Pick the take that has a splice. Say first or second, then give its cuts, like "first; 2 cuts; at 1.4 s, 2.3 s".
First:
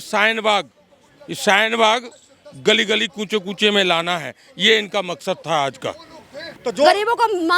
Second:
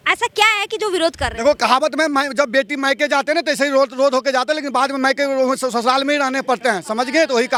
first; 1 cut; at 6.6 s